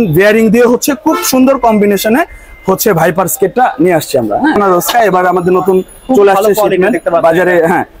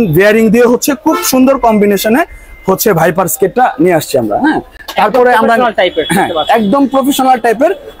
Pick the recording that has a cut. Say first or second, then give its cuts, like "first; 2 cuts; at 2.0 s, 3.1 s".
first; 1 cut; at 4.6 s